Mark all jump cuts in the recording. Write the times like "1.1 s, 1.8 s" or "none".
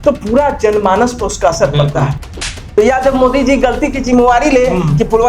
2.8 s